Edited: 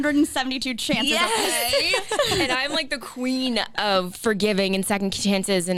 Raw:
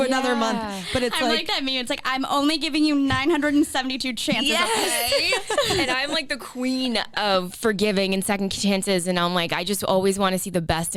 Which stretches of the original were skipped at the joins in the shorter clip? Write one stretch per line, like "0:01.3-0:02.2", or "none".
none